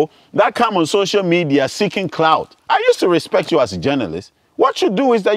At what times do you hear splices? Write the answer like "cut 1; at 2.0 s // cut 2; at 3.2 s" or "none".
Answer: cut 1; at 2.5 s